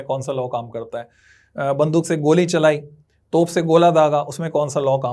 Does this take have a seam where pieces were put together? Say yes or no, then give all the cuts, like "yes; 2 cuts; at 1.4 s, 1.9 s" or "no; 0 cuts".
no; 0 cuts